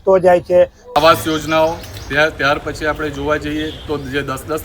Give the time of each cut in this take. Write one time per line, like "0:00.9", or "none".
0:01.0